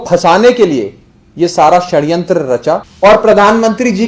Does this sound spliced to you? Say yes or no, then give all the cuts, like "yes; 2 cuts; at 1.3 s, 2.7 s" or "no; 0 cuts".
yes; 1 cut; at 2.9 s